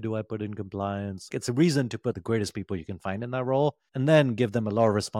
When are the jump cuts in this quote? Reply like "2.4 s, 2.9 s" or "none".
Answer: 1.4 s